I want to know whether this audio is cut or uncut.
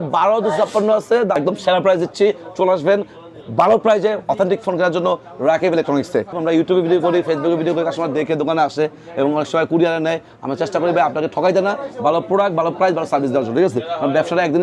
cut